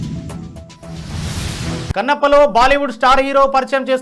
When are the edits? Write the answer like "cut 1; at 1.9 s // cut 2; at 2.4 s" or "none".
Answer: cut 1; at 1.9 s